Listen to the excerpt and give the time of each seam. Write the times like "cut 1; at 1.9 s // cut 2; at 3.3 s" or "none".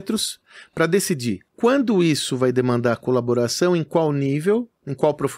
cut 1; at 1.5 s